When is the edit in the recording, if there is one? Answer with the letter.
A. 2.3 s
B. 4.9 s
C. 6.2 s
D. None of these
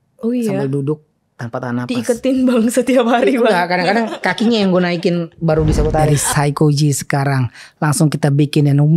C